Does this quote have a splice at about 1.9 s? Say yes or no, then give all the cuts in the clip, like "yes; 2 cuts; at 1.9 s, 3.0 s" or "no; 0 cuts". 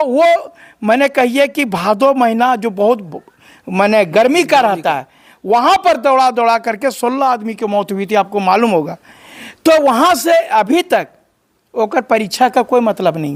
no; 0 cuts